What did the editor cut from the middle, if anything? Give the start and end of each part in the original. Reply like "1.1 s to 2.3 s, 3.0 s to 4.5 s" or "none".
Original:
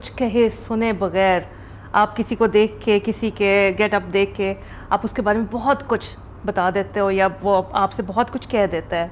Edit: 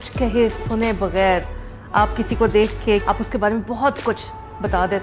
3.0 s to 4.9 s